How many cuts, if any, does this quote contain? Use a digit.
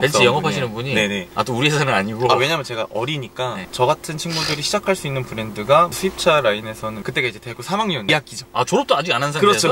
2